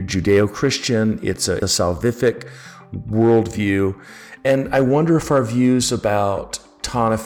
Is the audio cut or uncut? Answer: cut